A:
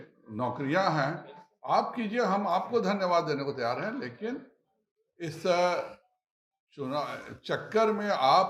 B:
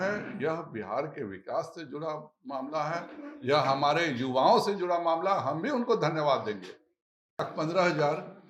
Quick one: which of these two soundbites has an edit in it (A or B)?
B